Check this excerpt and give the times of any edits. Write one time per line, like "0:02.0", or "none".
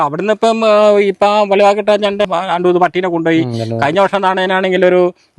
0:02.3